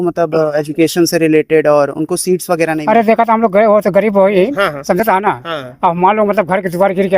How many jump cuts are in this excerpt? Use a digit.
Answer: 1